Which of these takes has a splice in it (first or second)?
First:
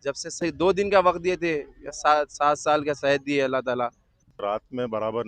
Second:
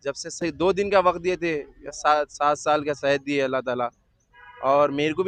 first